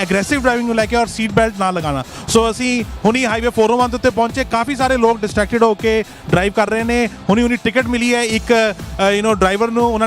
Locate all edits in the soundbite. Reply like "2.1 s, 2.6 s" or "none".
7.2 s